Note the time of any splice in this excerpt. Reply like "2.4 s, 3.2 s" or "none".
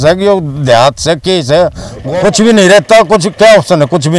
1.9 s

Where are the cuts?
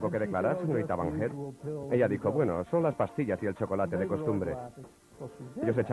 2.3 s

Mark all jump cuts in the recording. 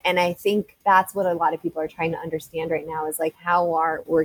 none

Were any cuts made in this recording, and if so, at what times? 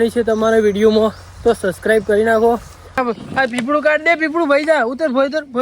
3.0 s

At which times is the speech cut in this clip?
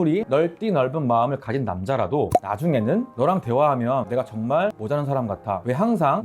none

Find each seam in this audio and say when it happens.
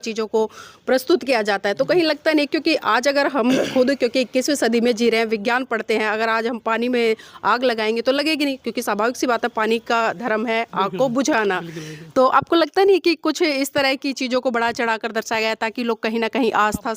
none

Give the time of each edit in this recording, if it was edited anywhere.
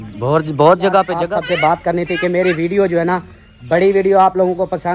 1.2 s

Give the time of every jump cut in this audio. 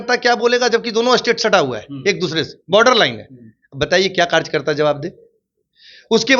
none

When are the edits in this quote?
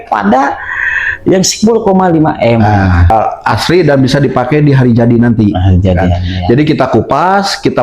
3.1 s

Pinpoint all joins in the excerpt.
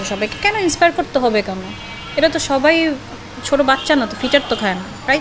none

